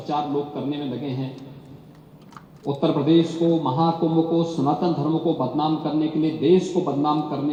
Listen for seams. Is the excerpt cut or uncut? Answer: uncut